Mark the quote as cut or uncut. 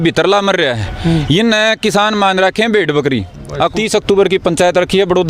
cut